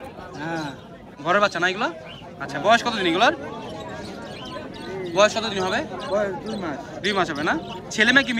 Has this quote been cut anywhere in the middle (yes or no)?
no